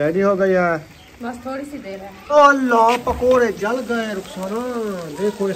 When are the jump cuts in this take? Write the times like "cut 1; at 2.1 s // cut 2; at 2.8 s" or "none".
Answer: cut 1; at 2.1 s